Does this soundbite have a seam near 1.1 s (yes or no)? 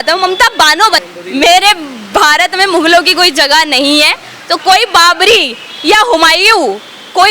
yes